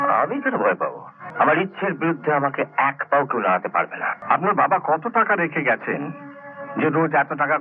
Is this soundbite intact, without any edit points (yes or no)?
no